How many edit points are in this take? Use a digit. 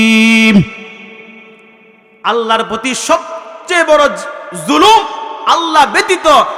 0